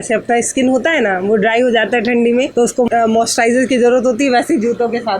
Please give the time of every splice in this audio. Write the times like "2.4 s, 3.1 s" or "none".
none

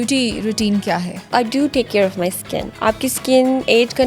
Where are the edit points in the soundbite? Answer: 1.2 s, 2.7 s

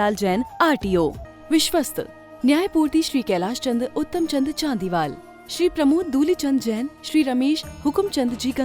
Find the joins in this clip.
1.3 s

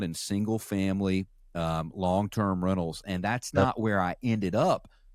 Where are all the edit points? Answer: none

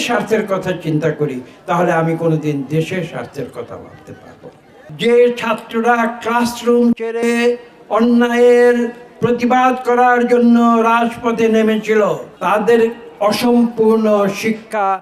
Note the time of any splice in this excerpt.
4.8 s, 12.3 s

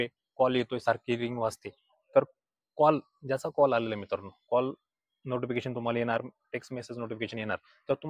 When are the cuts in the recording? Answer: none

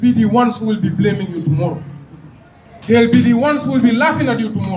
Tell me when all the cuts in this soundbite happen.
none

